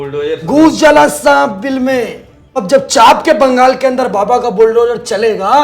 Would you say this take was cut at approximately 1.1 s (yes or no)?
no